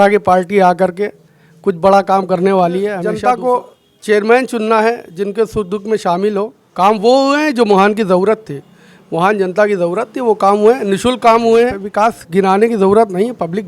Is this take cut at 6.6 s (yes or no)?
yes